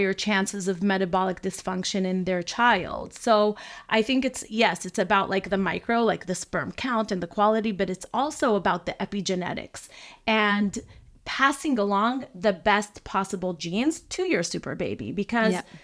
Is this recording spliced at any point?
no; 0 cuts

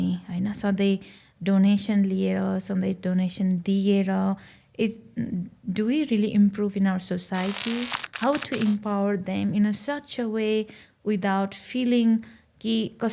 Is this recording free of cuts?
no; 1 cut; at 8.0 s

